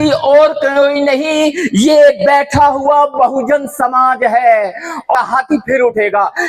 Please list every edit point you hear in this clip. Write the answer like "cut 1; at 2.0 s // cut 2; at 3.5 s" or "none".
cut 1; at 5.1 s